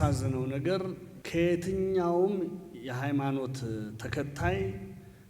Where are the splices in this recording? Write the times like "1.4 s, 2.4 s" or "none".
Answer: 1.1 s